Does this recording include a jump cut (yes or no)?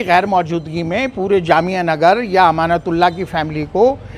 no